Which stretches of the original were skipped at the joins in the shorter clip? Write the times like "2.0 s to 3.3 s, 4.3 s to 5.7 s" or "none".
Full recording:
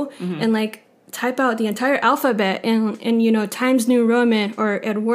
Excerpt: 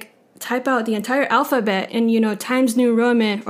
2.6 s to 3.0 s